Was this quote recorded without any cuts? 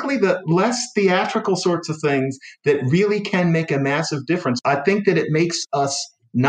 no; 1 cut; at 4.6 s

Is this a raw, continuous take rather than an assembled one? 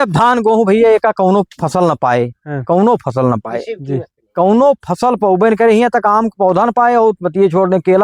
yes; 0 cuts

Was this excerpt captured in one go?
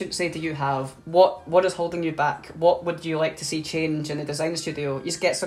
no; 1 cut; at 0.9 s

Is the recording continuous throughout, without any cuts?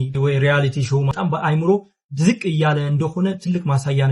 no; 1 cut; at 1.1 s

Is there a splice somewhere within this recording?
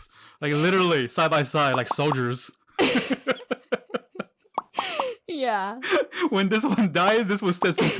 no; 0 cuts

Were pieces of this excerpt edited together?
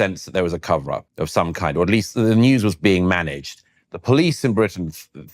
yes; 1 cut; at 1.0 s

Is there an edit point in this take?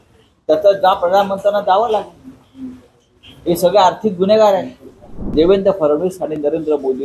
yes; 1 cut; at 5.3 s

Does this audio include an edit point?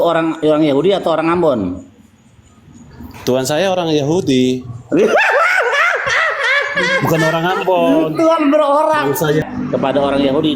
yes; 1 cut; at 9.4 s

